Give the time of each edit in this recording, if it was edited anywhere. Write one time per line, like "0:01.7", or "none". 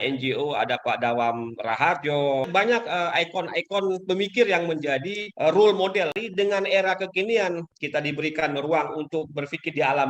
0:02.5
0:05.2
0:06.2
0:07.7